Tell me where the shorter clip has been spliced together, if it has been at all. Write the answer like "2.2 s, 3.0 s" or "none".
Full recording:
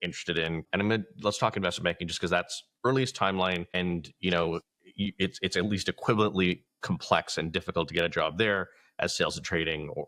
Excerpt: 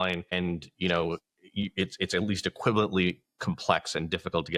none